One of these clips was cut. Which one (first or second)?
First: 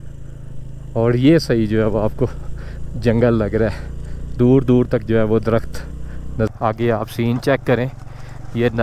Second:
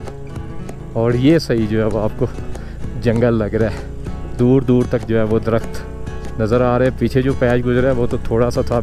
first